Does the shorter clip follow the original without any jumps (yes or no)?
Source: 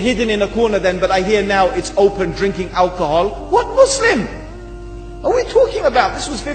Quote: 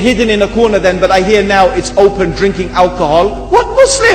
yes